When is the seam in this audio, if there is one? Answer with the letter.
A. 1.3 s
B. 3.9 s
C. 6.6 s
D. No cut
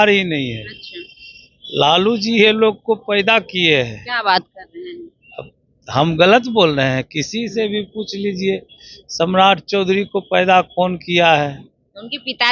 D